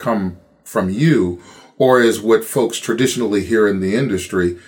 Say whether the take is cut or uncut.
uncut